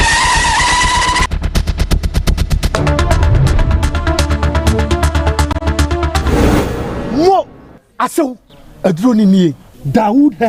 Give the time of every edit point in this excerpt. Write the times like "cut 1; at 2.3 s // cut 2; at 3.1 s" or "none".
none